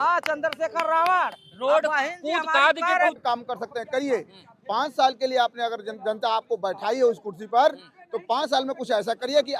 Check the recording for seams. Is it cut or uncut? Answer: cut